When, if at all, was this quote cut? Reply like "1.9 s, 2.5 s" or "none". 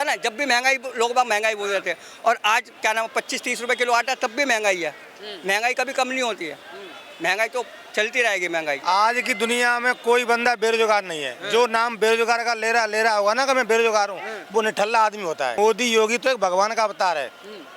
8.8 s, 15.5 s